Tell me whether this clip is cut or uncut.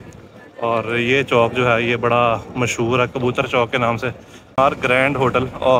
cut